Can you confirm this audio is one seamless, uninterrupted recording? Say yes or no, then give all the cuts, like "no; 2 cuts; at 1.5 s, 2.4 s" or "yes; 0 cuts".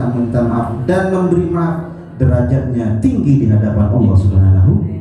yes; 0 cuts